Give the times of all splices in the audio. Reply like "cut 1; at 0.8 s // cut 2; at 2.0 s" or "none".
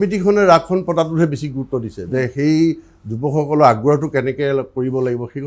none

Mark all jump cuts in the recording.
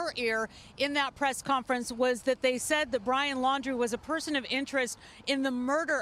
none

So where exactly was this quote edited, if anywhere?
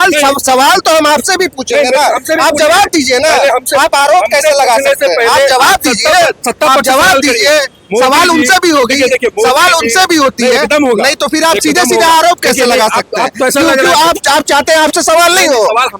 none

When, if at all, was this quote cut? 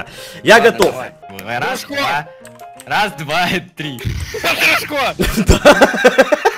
cut 1; at 1.2 s

